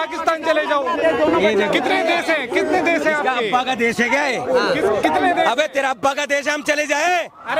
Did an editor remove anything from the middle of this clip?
no; 0 cuts

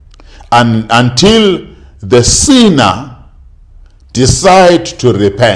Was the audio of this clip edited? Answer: no; 0 cuts

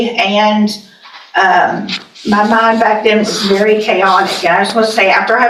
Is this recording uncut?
yes; 0 cuts

